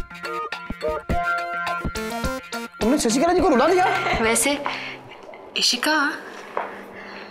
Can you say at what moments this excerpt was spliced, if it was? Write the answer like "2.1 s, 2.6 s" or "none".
4.0 s